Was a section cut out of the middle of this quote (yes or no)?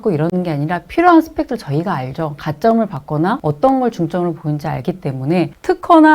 yes